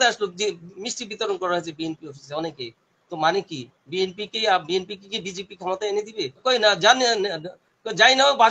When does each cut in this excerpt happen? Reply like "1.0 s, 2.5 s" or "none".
6.2 s